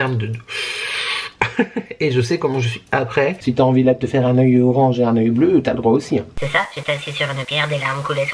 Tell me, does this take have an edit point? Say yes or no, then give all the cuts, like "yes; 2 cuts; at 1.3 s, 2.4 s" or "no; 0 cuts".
yes; 2 cuts; at 3.4 s, 6.3 s